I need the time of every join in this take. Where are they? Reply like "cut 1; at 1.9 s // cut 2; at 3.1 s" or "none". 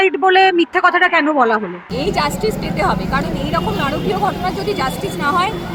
cut 1; at 1.9 s

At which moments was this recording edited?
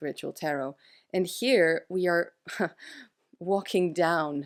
none

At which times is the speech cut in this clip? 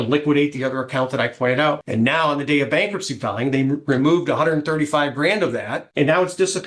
cut 1; at 1.8 s // cut 2; at 5.8 s

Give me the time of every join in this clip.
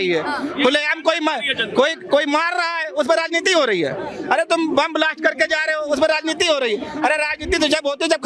none

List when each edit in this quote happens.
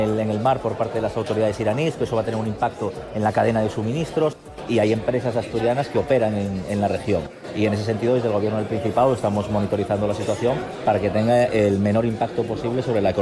none

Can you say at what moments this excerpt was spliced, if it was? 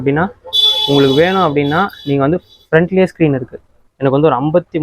cut 1; at 3.8 s

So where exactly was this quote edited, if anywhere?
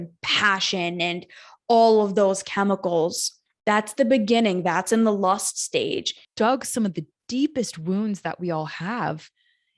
cut 1; at 6.2 s

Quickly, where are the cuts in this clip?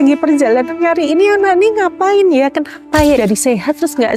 cut 1; at 3.2 s

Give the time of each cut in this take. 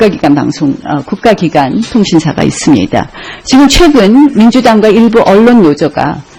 none

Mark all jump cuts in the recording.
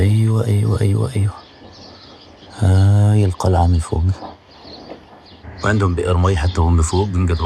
none

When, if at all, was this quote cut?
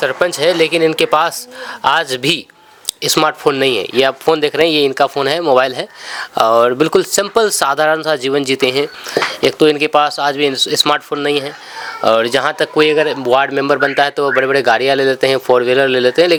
none

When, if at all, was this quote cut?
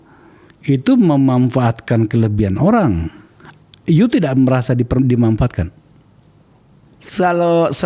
none

